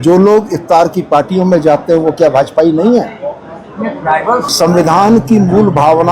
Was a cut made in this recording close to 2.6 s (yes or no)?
no